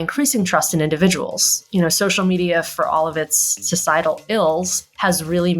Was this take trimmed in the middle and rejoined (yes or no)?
no